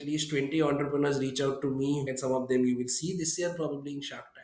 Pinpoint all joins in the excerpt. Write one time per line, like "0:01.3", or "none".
0:02.1